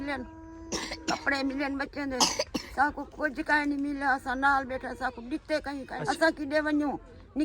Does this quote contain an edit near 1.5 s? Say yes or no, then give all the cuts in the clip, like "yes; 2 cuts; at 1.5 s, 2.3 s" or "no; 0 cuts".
no; 1 cut; at 6.0 s